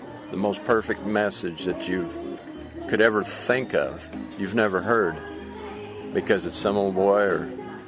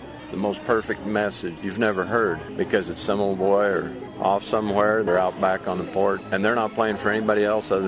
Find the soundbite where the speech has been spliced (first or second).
second